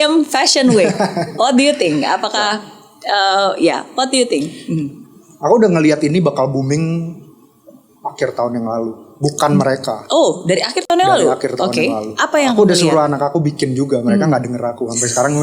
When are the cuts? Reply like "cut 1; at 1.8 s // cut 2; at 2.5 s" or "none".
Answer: none

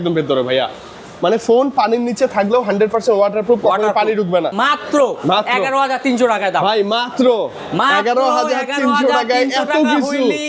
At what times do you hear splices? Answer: cut 1; at 4.5 s

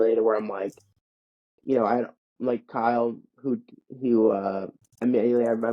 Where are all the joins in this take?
none

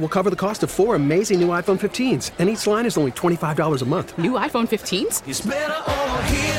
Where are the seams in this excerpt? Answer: none

